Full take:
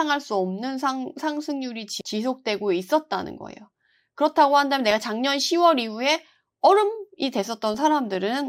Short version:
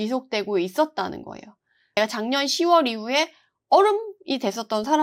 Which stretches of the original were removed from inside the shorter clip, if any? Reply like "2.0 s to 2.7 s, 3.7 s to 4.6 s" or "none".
4.1 s to 4.9 s